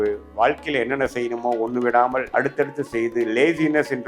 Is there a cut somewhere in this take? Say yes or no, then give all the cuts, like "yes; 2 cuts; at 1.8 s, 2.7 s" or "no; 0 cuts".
yes; 1 cut; at 2.3 s